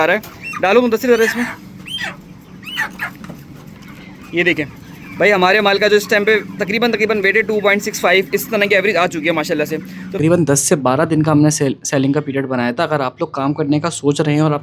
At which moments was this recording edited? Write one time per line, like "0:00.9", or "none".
0:10.2